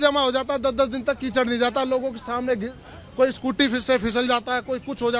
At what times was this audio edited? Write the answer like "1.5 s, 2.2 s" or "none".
none